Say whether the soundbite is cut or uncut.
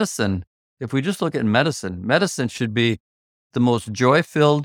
uncut